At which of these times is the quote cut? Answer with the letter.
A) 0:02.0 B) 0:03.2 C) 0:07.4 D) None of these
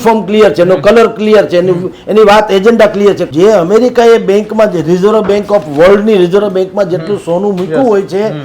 B